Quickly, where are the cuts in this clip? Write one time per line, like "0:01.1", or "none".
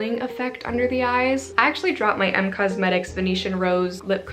0:01.5